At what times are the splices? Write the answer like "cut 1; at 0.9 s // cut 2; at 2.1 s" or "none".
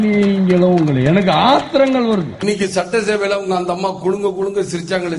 cut 1; at 2.3 s